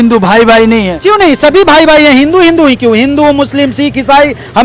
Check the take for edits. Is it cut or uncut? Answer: uncut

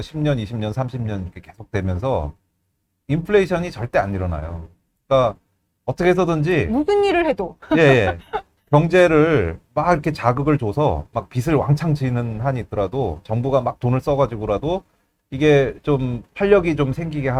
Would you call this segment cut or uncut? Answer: uncut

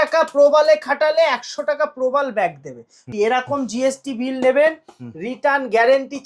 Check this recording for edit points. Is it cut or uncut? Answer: cut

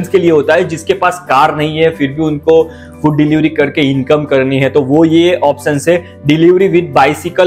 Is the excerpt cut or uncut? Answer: uncut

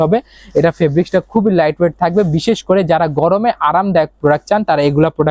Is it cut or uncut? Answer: uncut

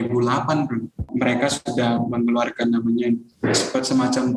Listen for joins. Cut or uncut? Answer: cut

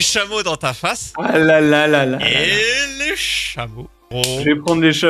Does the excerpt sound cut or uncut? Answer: cut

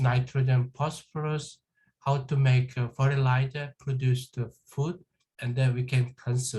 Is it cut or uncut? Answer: uncut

